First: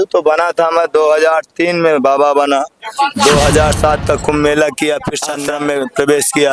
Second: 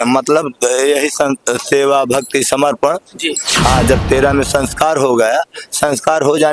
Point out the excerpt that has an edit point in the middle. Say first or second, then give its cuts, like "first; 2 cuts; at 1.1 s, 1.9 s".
first; 1 cut; at 5.2 s